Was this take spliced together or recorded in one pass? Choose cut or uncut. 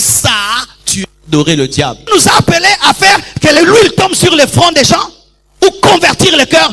cut